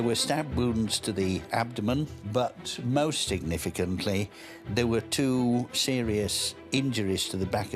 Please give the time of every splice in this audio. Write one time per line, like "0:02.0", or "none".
none